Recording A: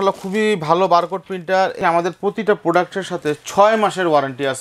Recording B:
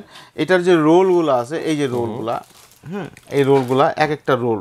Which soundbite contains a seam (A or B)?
A